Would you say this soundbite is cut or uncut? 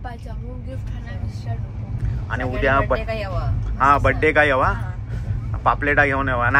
uncut